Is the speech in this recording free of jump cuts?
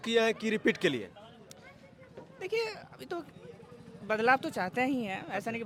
yes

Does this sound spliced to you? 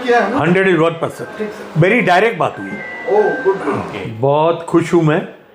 yes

